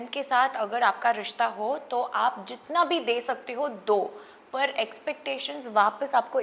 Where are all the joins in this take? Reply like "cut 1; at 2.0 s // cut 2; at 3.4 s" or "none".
none